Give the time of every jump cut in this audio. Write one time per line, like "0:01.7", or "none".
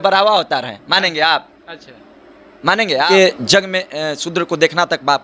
0:03.1